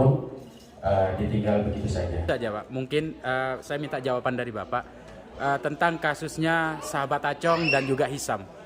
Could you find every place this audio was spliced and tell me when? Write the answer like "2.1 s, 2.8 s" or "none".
2.2 s